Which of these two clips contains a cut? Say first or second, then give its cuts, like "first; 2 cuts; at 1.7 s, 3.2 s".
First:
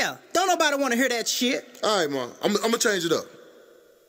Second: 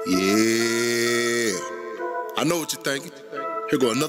second; 1 cut; at 2.1 s